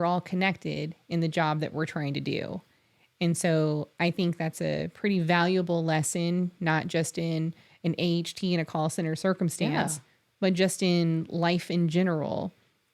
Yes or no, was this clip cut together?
no